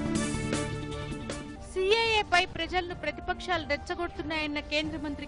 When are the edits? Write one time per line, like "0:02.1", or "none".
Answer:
0:01.5